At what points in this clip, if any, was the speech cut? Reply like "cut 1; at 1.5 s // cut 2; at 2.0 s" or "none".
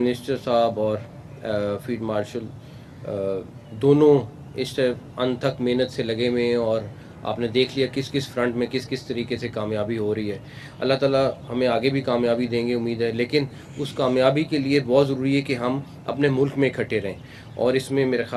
none

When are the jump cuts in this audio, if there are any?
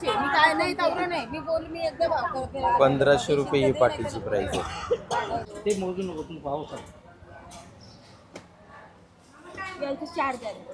cut 1; at 5.5 s

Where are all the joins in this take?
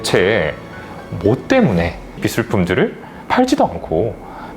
cut 1; at 2.2 s

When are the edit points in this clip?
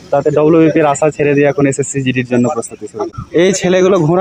cut 1; at 3.1 s

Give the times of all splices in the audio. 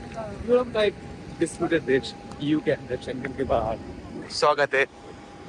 none

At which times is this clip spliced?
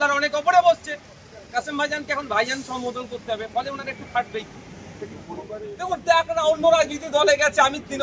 cut 1; at 5.7 s

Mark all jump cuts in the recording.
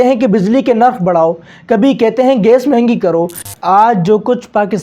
cut 1; at 3.3 s

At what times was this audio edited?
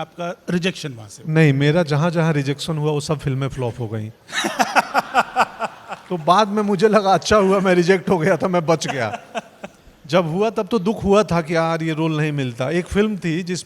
none

